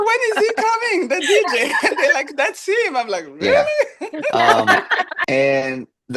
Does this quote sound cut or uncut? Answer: cut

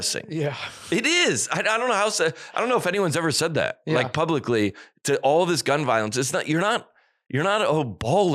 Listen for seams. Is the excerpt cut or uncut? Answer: uncut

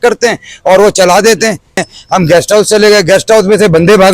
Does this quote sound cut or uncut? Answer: cut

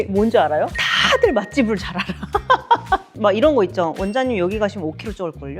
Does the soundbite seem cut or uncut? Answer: cut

